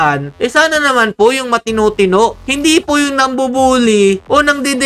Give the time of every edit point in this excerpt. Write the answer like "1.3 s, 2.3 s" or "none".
2.4 s